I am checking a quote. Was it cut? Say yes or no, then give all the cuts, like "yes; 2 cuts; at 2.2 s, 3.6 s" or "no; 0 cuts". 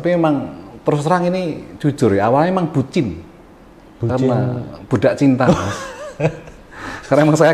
no; 0 cuts